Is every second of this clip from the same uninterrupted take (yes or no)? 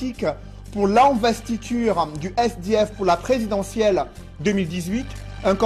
no